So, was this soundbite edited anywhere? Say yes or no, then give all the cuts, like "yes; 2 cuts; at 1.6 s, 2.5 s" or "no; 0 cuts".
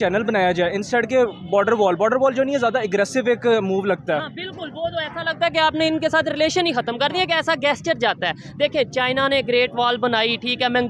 no; 0 cuts